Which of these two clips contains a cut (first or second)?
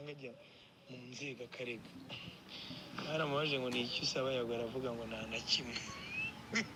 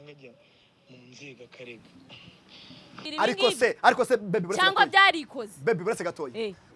second